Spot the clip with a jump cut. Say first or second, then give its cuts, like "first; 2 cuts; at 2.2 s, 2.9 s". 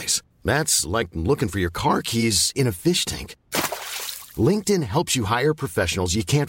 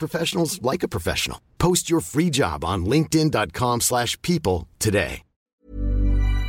second; 1 cut; at 5.5 s